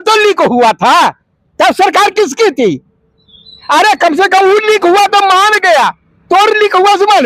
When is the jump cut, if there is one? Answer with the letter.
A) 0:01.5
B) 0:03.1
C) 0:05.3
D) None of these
D